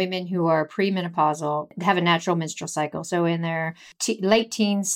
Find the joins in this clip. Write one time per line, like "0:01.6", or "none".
0:01.7
0:03.9